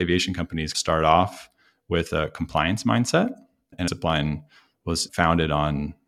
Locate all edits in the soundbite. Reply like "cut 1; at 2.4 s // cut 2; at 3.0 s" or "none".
cut 1; at 3.9 s